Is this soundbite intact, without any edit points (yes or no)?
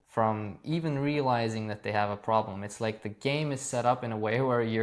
yes